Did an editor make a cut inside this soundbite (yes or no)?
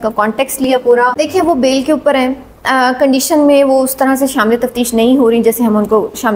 yes